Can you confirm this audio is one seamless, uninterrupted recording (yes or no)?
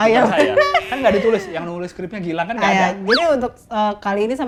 yes